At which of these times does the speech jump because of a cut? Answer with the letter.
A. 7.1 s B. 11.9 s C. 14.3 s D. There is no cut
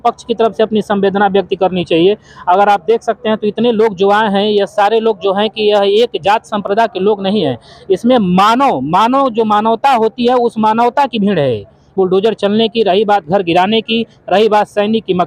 B